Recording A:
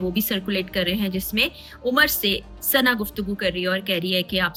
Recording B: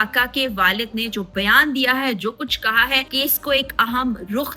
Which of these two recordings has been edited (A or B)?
B